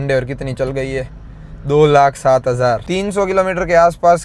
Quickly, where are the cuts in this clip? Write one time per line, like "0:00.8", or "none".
0:02.8